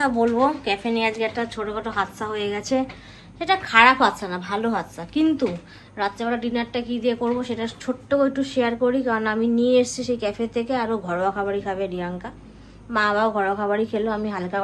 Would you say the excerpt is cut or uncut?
uncut